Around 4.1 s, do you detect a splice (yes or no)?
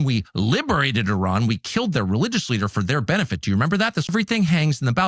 yes